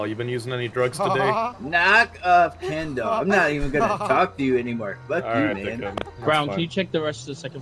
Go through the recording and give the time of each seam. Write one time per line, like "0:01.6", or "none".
none